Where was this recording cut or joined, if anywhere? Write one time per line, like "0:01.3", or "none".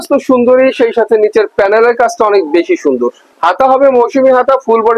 0:03.2